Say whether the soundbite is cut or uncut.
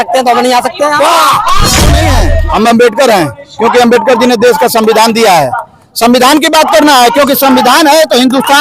cut